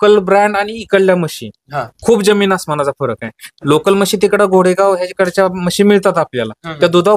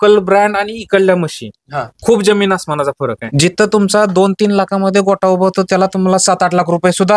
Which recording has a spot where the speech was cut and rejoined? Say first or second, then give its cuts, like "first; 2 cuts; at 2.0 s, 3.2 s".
second; 1 cut; at 3.2 s